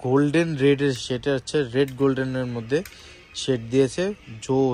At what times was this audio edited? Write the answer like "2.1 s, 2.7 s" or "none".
none